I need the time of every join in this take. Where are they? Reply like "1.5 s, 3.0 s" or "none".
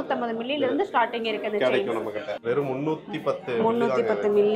2.4 s